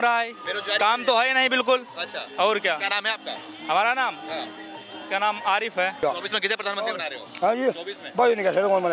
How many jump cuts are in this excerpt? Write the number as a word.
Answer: one